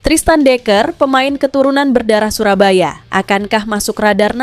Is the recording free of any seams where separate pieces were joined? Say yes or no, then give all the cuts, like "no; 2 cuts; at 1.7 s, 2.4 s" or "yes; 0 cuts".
yes; 0 cuts